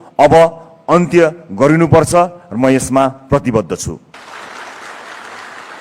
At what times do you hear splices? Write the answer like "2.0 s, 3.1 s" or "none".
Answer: 4.2 s